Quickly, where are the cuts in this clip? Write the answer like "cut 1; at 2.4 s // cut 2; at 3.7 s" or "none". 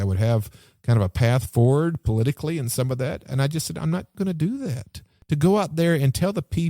cut 1; at 4.1 s // cut 2; at 5.1 s